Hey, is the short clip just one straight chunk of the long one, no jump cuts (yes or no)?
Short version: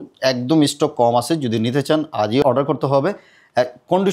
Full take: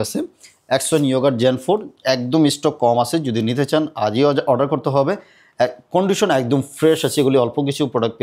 no